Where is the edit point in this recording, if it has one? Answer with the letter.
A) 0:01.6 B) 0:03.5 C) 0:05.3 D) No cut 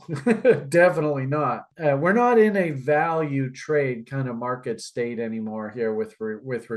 A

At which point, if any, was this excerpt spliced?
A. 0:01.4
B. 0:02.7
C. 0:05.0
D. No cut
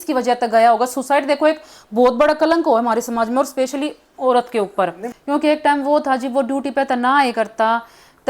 C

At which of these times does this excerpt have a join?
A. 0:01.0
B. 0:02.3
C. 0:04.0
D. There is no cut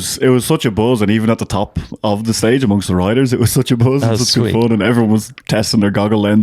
D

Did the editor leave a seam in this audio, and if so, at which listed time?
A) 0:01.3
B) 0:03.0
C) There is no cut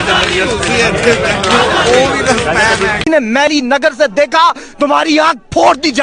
B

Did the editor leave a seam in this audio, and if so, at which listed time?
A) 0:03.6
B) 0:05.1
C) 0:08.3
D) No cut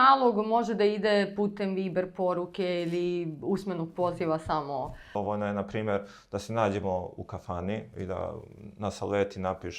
B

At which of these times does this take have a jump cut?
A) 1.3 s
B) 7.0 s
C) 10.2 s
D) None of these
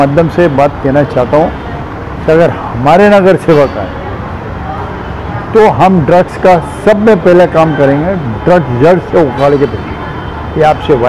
D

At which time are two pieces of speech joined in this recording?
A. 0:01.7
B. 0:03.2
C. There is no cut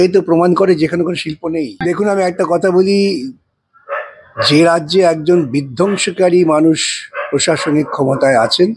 A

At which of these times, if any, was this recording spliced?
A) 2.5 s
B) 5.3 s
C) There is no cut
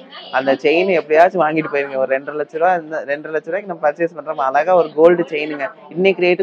C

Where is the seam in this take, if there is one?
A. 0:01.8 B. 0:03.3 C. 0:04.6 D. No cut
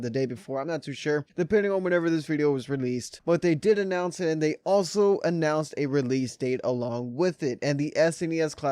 C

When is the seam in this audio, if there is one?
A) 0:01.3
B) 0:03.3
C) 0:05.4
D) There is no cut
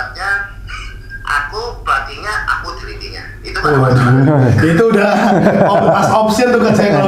D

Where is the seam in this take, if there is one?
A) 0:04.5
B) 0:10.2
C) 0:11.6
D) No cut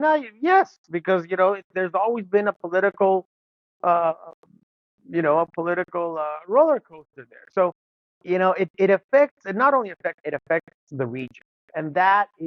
B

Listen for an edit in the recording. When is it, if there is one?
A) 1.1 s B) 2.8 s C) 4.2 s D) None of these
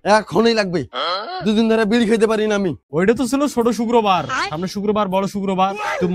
B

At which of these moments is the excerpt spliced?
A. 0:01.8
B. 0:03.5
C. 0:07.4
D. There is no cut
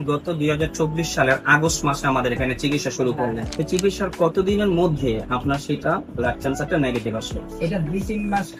B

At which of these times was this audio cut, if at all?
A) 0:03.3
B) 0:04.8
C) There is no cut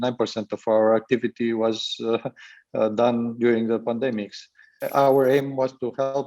B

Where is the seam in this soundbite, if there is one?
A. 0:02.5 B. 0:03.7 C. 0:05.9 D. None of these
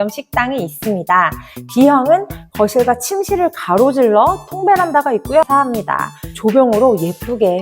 C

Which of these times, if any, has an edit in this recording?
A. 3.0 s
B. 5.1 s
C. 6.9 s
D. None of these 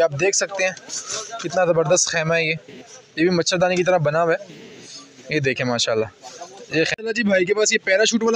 C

